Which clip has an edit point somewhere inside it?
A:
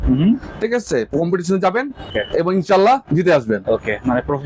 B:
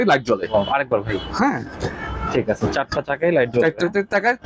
A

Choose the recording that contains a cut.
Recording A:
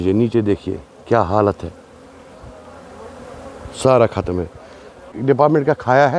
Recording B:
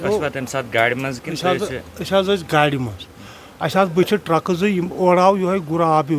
A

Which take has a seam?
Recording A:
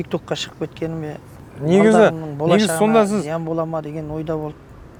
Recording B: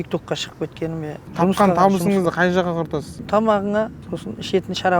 B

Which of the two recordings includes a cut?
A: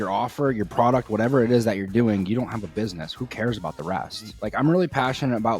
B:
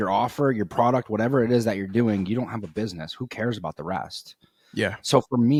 A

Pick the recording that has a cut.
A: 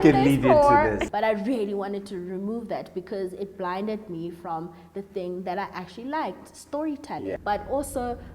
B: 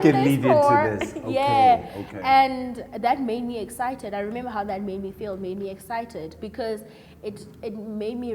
A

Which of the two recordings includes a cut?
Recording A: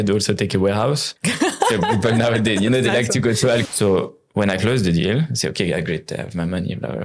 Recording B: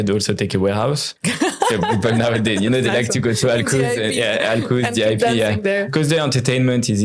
A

